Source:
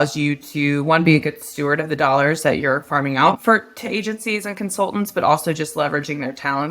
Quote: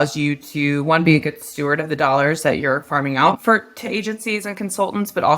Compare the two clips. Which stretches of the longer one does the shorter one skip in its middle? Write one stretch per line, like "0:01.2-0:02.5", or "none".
none